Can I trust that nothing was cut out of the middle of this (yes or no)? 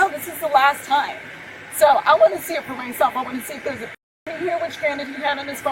yes